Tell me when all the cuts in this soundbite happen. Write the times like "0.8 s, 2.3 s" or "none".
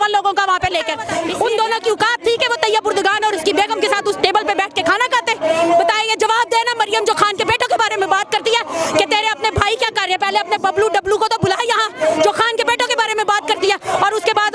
1.2 s